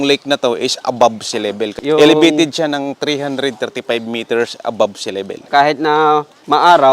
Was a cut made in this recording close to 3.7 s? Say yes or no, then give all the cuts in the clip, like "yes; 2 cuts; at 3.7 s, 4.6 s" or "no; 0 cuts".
no; 2 cuts; at 1.7 s, 5.5 s